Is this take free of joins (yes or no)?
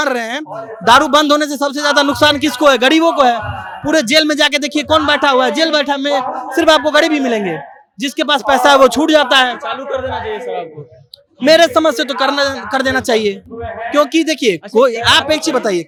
yes